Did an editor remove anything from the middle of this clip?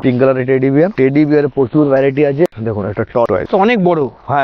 yes; 1 cut; at 2.5 s

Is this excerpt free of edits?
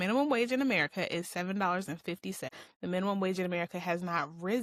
yes; 0 cuts

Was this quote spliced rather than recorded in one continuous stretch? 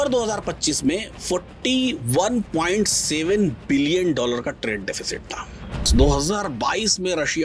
yes; 1 cut; at 5.8 s

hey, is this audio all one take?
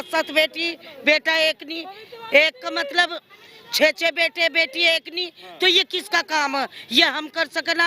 yes; 0 cuts

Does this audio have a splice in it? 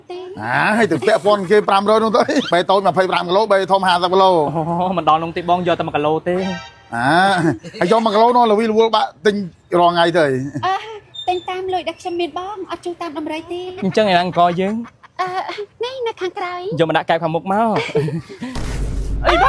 yes; 2 cuts; at 2.4 s, 13.7 s

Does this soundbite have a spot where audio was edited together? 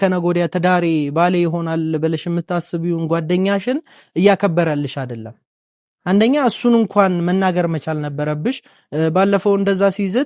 no; 0 cuts

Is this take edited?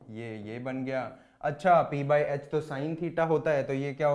no; 0 cuts

